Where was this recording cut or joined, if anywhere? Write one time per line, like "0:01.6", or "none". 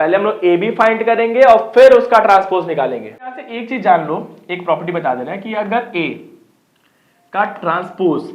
0:03.5